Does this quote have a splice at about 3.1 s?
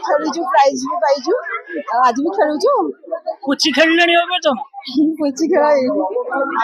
no; 0 cuts

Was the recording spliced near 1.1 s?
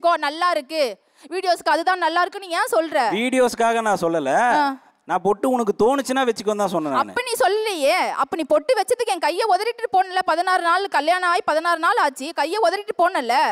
no; 0 cuts

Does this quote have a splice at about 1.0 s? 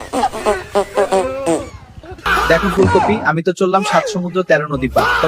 no; 1 cut; at 2.3 s

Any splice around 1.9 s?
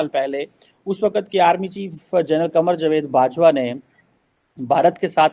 no; 0 cuts

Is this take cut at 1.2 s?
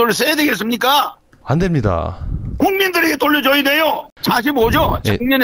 no; 1 cut; at 4.0 s

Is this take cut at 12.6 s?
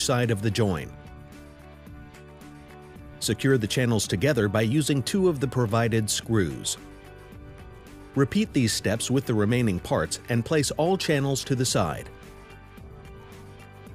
yes; 1 cut; at 12.6 s

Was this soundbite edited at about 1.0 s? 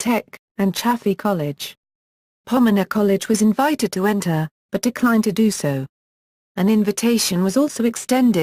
no; 1 cut; at 2.9 s

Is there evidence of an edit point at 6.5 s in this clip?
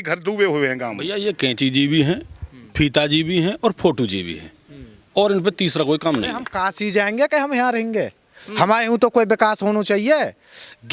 yes; 2 cuts; at 1.0 s, 6.5 s

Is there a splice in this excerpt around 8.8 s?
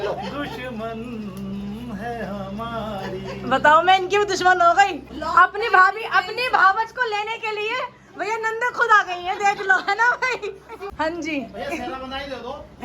no; 2 cuts; at 5.1 s, 10.9 s

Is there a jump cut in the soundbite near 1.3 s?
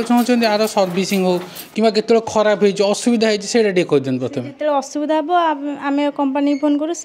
no; 0 cuts

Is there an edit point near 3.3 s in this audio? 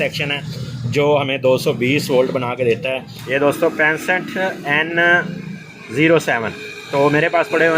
yes; 1 cut; at 3.3 s

